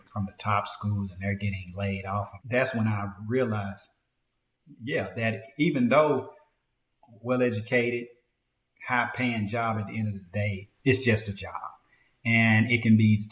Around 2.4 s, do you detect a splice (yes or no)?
yes